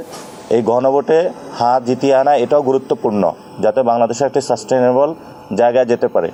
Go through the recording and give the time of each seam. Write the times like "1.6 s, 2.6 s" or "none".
none